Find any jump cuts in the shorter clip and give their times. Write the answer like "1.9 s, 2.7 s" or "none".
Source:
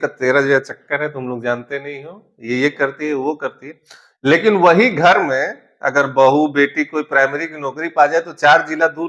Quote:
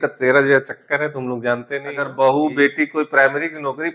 2.0 s